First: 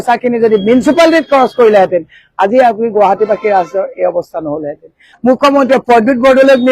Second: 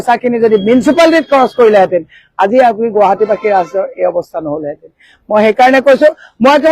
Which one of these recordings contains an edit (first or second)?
first